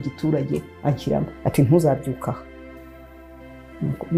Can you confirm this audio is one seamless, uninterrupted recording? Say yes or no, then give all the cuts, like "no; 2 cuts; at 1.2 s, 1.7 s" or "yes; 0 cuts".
yes; 0 cuts